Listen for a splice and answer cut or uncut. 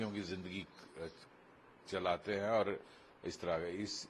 uncut